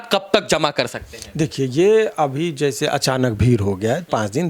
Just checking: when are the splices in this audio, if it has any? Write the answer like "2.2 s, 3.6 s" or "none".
none